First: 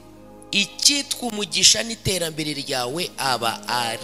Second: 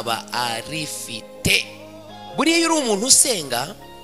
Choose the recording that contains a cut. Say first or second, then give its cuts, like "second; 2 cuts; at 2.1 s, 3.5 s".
second; 1 cut; at 1.8 s